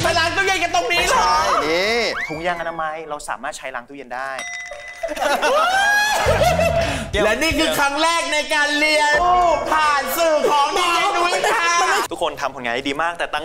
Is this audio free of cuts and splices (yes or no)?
no